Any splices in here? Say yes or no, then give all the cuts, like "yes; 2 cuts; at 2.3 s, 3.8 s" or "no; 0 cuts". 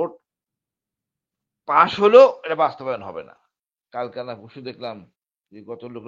yes; 1 cut; at 3.8 s